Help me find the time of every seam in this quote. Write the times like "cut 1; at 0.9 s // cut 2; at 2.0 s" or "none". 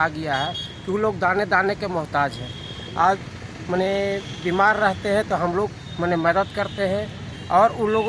none